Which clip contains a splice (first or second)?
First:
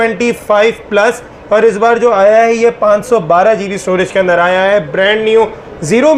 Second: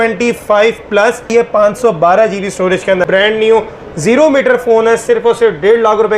second